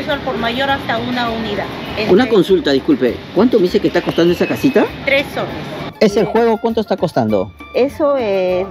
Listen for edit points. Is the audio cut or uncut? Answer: cut